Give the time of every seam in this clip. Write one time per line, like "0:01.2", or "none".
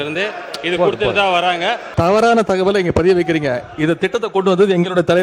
0:01.9